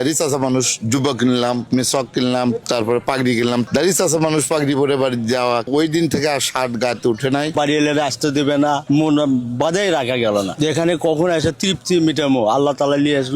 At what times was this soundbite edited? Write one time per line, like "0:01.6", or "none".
0:03.7
0:05.7
0:07.5